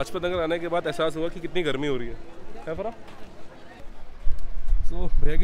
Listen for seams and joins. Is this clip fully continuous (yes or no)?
no